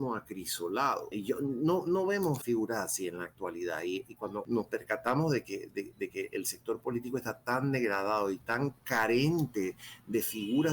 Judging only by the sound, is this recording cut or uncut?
cut